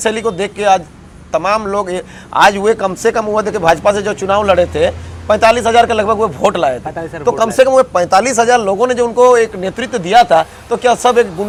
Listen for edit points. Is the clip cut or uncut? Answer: uncut